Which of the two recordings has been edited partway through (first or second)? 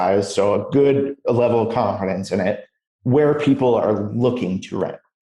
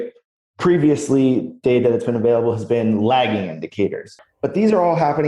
second